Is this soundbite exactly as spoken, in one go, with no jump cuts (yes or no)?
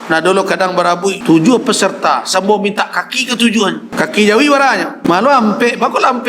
no